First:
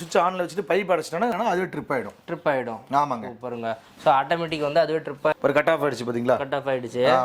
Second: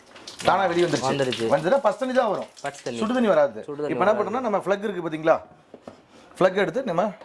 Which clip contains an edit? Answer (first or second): first